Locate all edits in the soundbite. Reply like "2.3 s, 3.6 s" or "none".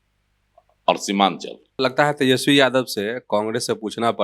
1.6 s